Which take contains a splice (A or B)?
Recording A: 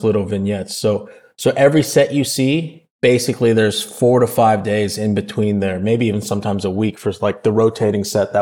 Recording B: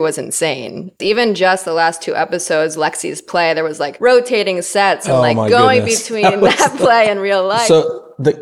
B